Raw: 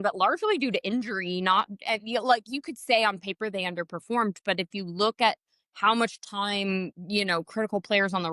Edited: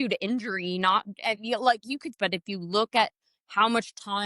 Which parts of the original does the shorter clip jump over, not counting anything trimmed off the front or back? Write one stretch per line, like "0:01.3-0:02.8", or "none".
0:02.8-0:04.4